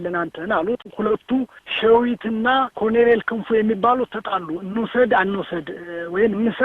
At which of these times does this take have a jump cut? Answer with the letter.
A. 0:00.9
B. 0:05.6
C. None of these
A